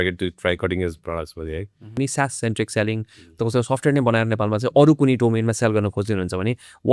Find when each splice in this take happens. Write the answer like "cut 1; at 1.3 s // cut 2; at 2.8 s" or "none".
cut 1; at 1.9 s